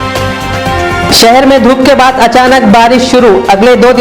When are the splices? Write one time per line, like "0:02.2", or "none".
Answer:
0:01.1